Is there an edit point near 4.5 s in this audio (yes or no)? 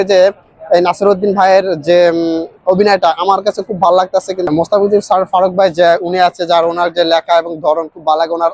yes